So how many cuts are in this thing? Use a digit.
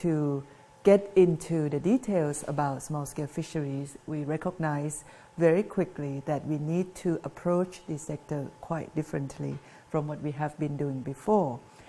0